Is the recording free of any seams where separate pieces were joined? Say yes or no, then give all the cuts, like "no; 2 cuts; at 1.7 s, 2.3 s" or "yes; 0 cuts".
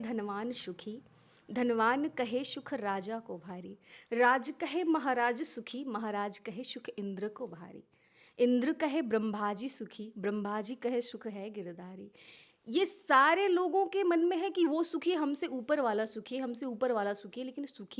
yes; 0 cuts